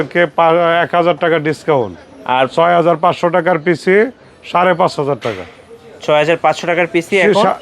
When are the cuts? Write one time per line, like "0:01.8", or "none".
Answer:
none